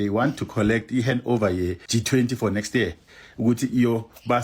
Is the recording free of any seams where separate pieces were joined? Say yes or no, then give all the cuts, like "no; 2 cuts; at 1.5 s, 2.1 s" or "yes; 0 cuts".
yes; 0 cuts